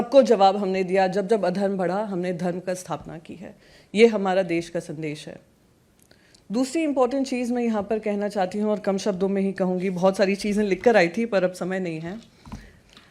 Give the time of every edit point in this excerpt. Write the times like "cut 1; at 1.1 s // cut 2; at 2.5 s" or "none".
none